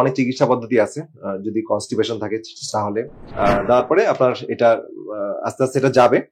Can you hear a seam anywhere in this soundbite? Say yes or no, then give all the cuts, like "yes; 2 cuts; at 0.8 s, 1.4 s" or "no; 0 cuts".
yes; 1 cut; at 3.3 s